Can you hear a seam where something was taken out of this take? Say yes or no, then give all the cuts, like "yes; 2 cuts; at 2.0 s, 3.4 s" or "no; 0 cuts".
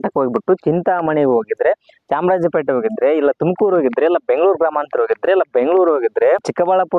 no; 0 cuts